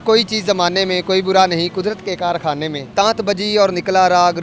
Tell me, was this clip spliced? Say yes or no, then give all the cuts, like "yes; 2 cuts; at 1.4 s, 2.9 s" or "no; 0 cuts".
yes; 1 cut; at 2.9 s